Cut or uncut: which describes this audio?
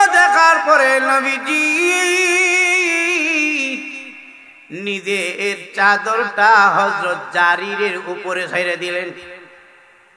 uncut